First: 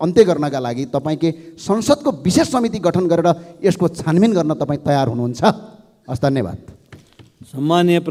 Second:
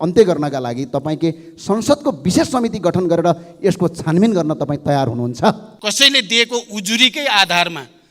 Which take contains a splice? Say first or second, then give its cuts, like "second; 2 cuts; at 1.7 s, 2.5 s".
second; 1 cut; at 5.7 s